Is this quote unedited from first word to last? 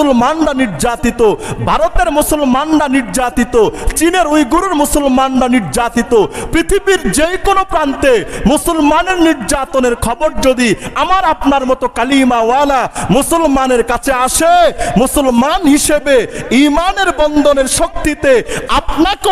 yes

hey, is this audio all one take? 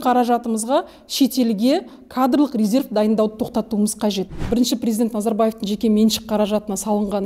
no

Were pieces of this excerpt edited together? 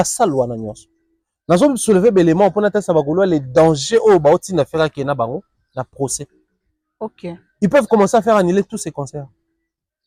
no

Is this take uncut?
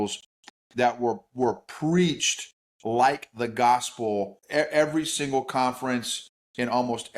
no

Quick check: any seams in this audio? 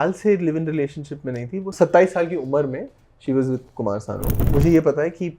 yes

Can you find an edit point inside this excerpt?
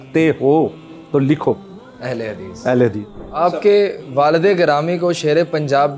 yes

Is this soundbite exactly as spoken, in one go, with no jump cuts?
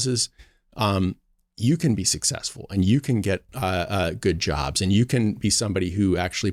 yes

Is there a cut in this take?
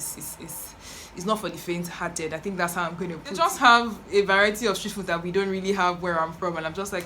yes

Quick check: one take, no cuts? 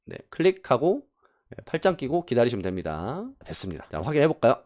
yes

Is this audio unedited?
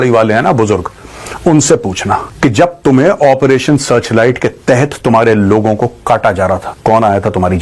no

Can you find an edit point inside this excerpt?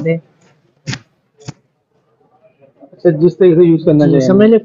no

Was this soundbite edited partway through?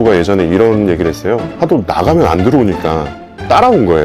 yes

